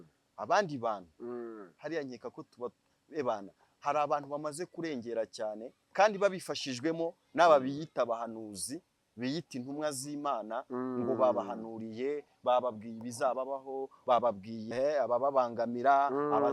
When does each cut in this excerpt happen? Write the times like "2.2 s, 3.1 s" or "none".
5.7 s, 14.7 s

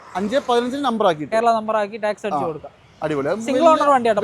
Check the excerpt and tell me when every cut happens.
none

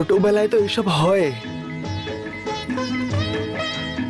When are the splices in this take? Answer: none

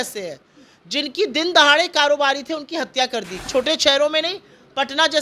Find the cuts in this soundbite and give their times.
3.4 s

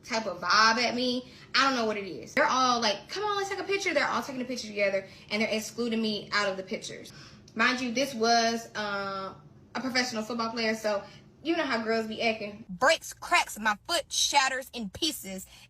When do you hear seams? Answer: 2.4 s, 7.1 s, 12.6 s

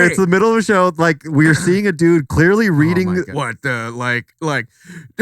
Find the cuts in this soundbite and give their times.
3.4 s

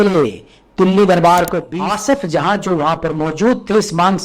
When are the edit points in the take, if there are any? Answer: 1.6 s

